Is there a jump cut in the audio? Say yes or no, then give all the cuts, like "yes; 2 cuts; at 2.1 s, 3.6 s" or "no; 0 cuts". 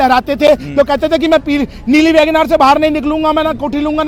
no; 0 cuts